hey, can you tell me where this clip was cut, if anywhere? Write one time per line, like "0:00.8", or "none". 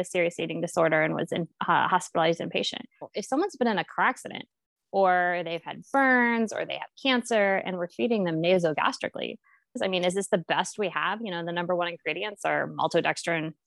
0:03.1
0:09.8

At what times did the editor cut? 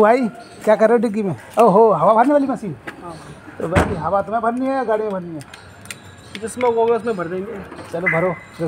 none

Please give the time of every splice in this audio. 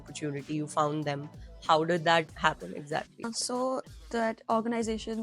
0:03.3

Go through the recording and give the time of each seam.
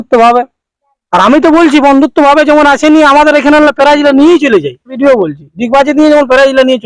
0:04.9

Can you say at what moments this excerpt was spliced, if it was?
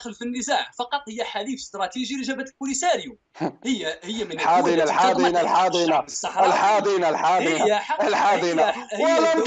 none

